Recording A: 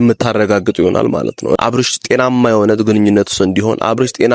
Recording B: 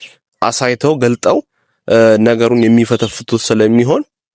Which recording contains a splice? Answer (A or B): A